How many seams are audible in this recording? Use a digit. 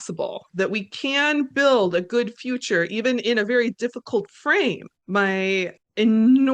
1